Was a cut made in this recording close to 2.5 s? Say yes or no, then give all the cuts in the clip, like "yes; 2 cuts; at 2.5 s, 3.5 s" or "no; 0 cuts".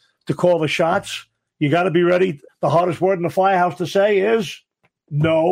yes; 1 cut; at 2.5 s